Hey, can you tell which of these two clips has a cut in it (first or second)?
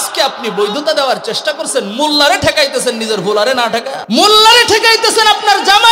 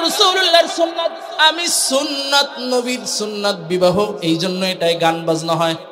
first